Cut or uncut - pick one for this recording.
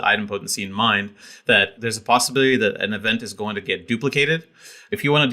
uncut